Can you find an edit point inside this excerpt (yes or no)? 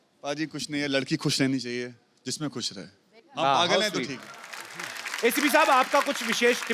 no